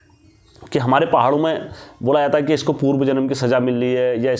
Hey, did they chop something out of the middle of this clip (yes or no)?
no